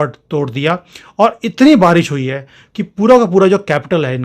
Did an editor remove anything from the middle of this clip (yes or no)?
no